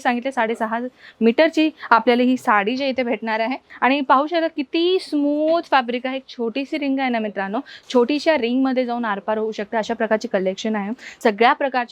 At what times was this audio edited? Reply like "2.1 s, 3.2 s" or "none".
3.6 s, 11.0 s

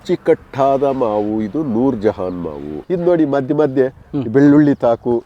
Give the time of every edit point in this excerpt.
2.7 s

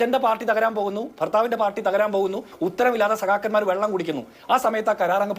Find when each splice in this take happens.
4.4 s

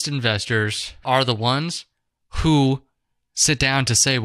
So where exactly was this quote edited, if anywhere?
0.9 s

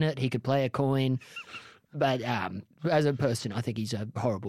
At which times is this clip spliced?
2.7 s

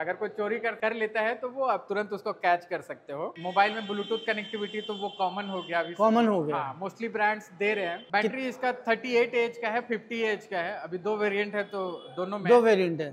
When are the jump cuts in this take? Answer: none

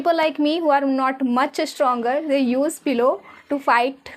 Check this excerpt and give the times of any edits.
none

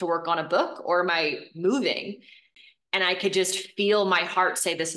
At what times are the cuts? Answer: 2.6 s

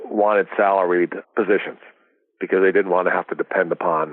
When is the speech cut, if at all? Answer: 1.2 s

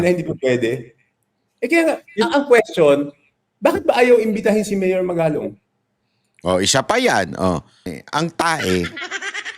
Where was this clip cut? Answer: 8.0 s

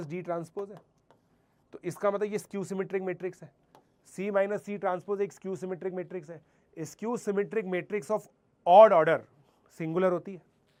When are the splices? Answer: none

